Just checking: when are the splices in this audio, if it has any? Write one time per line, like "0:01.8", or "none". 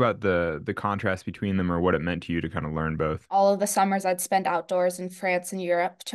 0:03.3

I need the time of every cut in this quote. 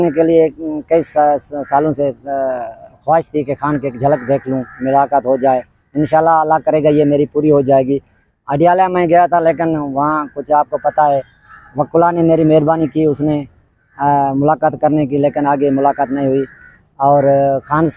none

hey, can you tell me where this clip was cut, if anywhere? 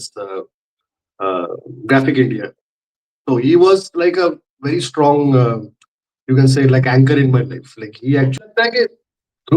0:08.3

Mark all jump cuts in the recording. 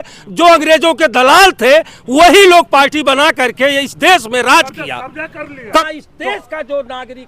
0:05.8

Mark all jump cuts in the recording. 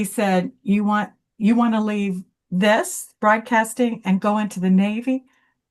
none

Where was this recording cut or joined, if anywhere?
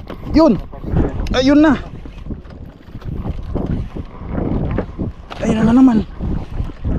none

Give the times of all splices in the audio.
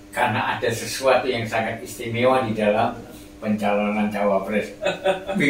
none

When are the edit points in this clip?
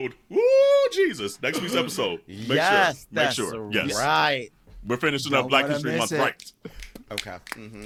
none

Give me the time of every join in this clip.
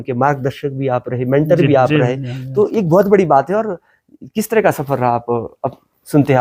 none

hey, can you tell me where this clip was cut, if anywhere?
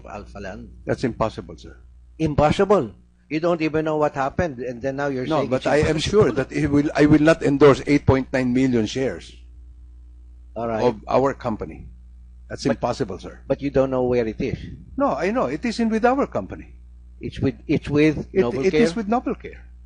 0:05.1

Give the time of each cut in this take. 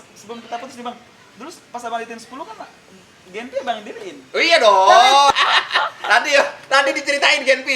0:05.3

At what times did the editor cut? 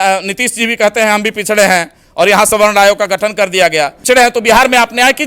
0:04.0

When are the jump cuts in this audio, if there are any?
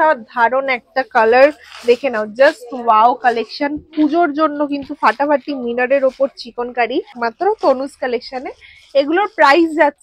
0:07.2

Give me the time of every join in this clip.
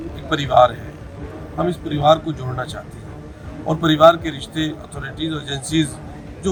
none

